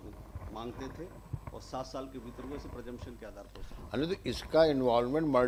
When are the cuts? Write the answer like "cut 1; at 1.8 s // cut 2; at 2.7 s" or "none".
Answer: none

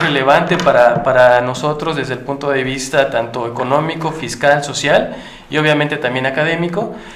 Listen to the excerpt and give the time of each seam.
none

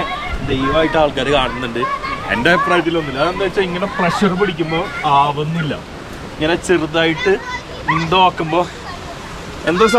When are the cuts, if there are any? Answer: none

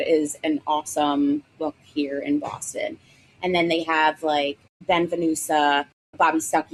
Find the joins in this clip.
none

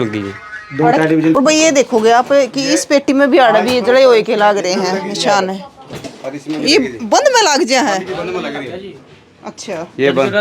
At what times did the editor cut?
cut 1; at 1.4 s

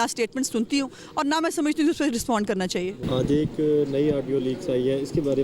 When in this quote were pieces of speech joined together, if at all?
none

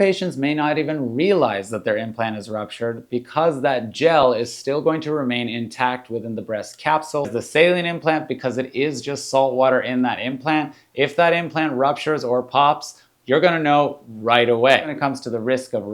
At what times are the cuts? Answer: cut 1; at 7.3 s // cut 2; at 14.9 s

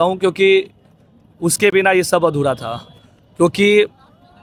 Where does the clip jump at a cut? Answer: none

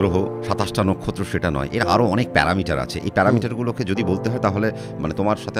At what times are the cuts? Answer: none

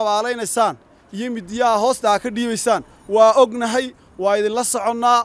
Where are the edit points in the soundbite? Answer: none

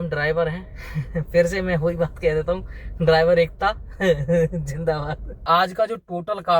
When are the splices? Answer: cut 1; at 5.4 s

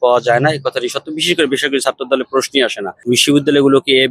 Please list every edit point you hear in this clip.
cut 1; at 3.0 s

